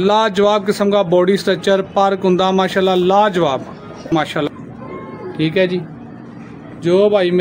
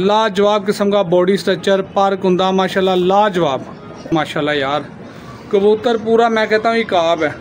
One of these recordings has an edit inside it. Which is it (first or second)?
first